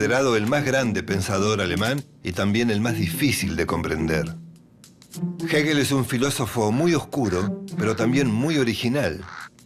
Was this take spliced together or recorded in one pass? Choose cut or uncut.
uncut